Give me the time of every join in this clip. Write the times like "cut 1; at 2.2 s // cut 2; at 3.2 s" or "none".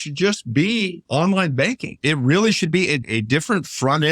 cut 1; at 1.0 s // cut 2; at 2.0 s // cut 3; at 3.0 s